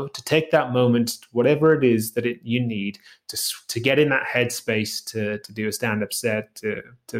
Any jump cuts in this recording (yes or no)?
yes